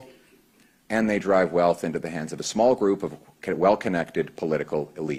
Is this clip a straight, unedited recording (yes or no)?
yes